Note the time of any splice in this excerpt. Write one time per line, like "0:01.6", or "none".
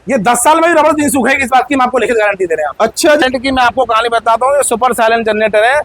0:03.2